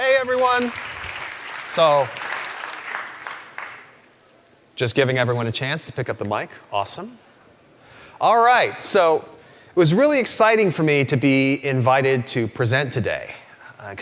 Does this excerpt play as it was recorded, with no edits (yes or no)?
no